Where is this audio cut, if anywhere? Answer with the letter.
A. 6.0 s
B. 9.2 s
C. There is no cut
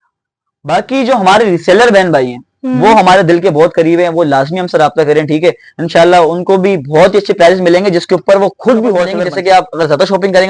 B